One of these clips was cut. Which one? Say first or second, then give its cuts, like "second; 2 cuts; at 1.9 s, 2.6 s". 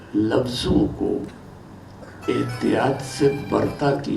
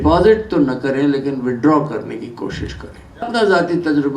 second; 1 cut; at 3.3 s